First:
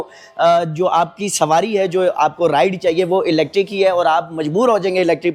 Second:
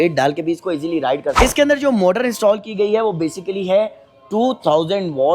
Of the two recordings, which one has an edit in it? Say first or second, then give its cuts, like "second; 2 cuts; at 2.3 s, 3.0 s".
second; 1 cut; at 1.3 s